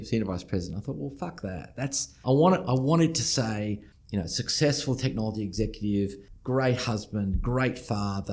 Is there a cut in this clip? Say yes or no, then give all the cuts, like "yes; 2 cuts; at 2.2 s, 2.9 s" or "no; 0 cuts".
yes; 3 cuts; at 2.2 s, 3.9 s, 6.3 s